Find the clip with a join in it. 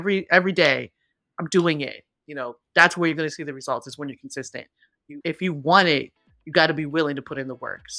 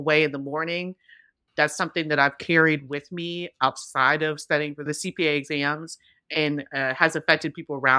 second; 2 cuts; at 1.4 s, 4.9 s

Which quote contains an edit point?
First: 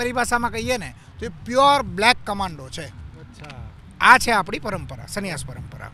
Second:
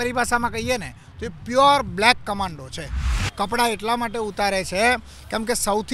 second; 1 cut; at 3.2 s

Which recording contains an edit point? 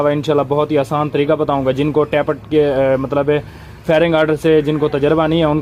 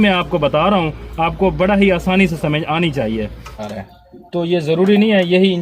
second; 1 cut; at 3.6 s

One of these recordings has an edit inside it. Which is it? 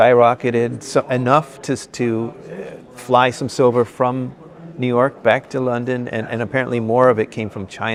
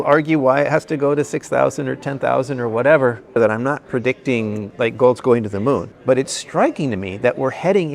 second; 2 cuts; at 3.2 s, 5.9 s

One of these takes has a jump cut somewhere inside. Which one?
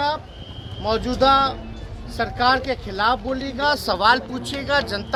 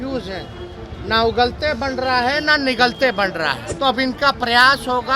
second; 1 cut; at 3.6 s

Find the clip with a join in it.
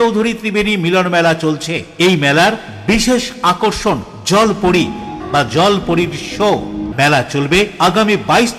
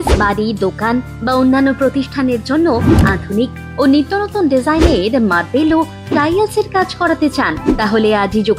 first; 2 cuts; at 5.2 s, 6.9 s

